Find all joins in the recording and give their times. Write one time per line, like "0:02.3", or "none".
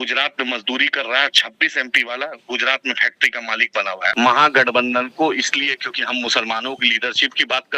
0:04.1